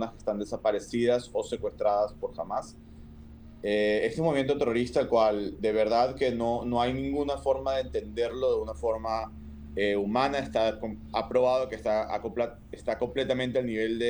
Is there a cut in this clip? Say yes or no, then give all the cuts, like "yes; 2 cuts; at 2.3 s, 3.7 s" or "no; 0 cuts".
no; 0 cuts